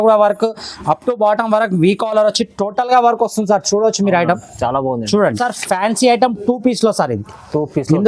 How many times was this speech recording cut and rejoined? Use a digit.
1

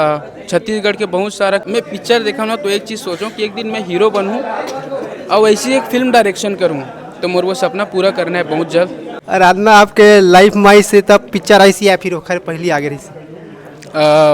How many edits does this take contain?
2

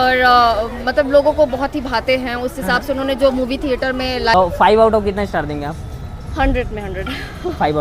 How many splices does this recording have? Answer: 1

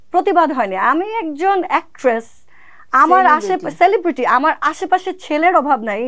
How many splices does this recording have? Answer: 0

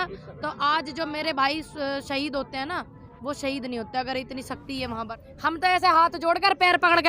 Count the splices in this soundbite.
1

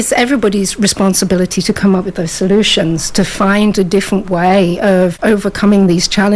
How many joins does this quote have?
1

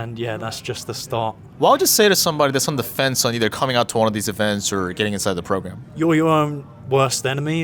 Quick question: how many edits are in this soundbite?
0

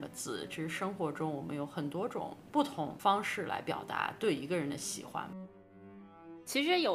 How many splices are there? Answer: 2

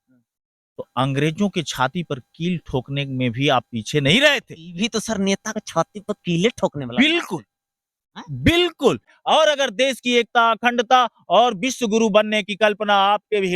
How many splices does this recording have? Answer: 1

